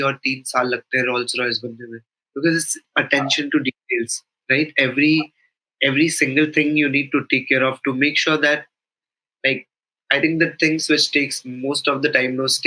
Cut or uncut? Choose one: uncut